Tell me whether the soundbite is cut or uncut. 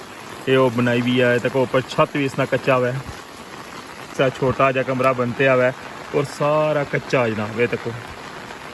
cut